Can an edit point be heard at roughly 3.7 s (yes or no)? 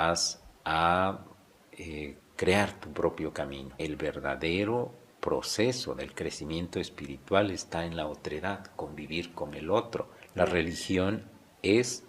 yes